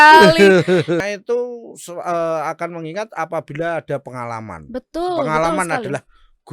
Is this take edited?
yes; 1 cut; at 1.0 s

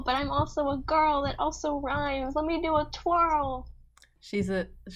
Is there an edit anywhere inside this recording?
no; 0 cuts

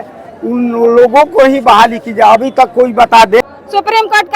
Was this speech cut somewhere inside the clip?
yes; 1 cut; at 3.4 s

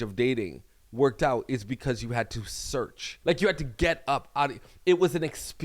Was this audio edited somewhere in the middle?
yes; 1 cut; at 3.0 s

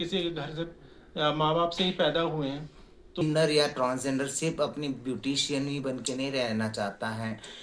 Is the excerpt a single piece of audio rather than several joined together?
no; 1 cut; at 3.2 s

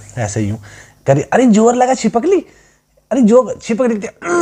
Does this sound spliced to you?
no; 0 cuts

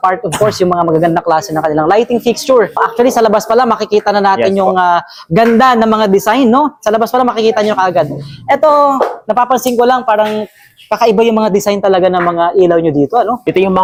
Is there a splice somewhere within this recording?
no; 0 cuts

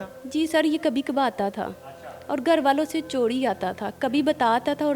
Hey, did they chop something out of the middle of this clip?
no; 0 cuts

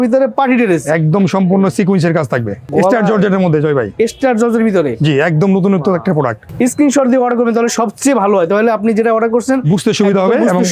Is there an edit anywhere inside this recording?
yes; 2 cuts; at 2.7 s, 6.4 s

